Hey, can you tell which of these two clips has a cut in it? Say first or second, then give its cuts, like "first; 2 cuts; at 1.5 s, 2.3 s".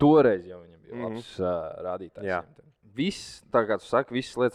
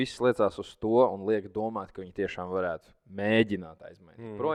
first; 1 cut; at 2.8 s